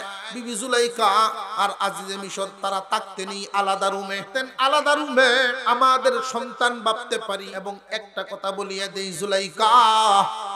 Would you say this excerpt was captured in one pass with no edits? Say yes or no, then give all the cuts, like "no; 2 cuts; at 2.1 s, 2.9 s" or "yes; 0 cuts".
no; 3 cuts; at 4.2 s, 5.6 s, 7.5 s